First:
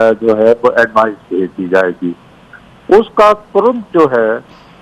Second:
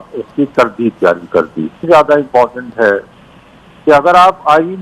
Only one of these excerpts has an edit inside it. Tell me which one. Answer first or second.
second